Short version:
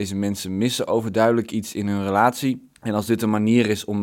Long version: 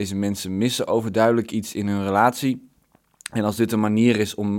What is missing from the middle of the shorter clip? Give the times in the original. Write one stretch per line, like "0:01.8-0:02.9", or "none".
0:02.7-0:03.2